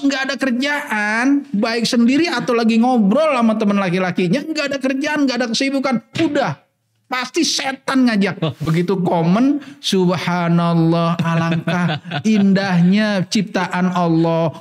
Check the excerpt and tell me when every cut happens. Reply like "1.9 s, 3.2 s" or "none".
8.6 s